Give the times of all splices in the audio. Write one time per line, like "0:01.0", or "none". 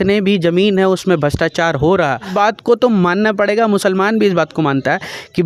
0:02.3